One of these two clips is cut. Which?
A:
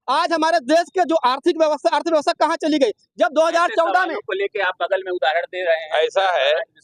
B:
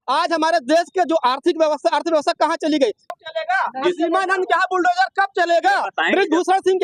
B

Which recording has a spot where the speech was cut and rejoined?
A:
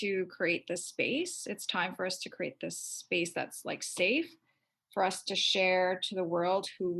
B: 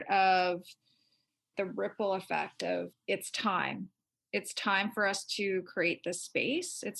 B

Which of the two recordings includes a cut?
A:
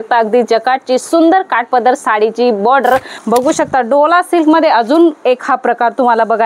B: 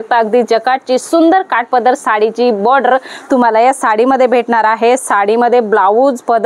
A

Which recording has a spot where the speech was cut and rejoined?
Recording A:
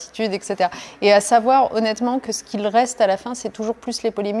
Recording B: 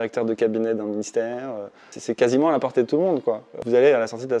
B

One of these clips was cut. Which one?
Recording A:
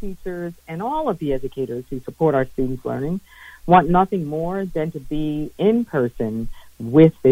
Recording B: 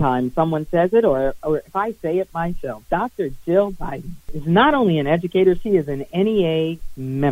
B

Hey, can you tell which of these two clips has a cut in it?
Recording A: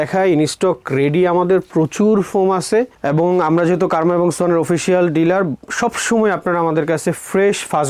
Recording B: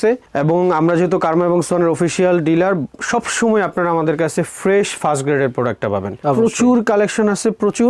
B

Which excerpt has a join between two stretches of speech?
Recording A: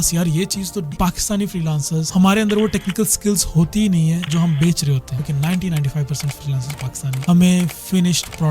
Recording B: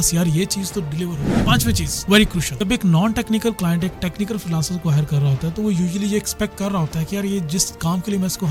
A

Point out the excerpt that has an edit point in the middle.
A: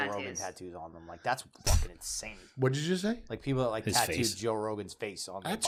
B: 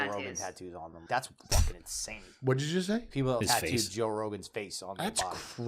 B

